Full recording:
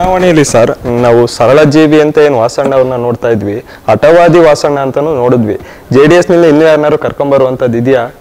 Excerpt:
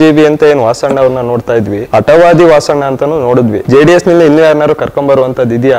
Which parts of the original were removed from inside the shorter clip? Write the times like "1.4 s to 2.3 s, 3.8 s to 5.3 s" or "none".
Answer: 3.5 s to 3.7 s, 5.5 s to 5.8 s